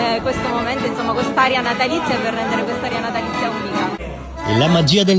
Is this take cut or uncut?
uncut